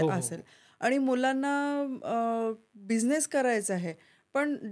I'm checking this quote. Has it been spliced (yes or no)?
no